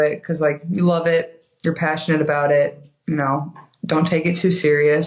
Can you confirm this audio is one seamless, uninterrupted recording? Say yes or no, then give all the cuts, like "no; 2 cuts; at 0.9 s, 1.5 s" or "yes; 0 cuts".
yes; 0 cuts